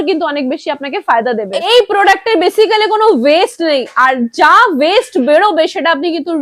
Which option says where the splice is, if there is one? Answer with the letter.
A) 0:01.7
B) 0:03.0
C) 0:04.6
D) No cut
A